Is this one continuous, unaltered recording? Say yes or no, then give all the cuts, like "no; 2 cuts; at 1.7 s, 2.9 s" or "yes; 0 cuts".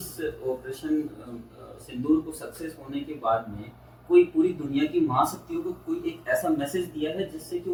yes; 0 cuts